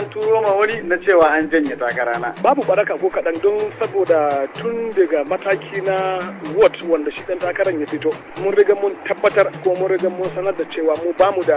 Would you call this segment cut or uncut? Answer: cut